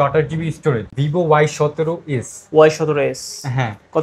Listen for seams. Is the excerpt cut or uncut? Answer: cut